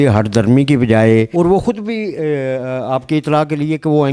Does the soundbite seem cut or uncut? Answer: uncut